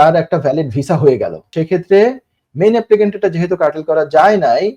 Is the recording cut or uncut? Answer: cut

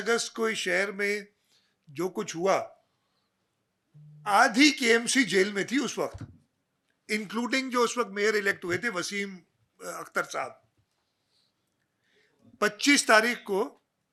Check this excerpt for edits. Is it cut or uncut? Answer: uncut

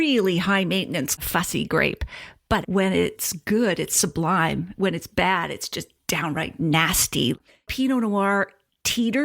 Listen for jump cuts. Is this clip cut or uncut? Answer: cut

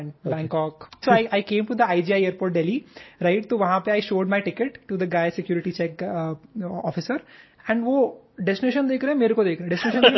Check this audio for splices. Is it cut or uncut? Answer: cut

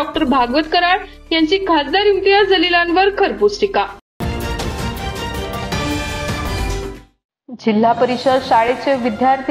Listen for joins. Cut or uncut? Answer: uncut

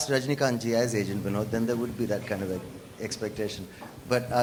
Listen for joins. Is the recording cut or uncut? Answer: uncut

